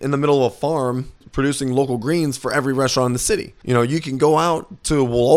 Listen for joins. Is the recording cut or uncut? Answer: cut